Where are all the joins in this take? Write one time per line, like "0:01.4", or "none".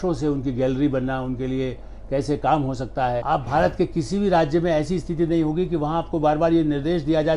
0:03.5